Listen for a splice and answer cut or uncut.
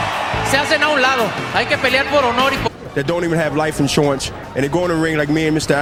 uncut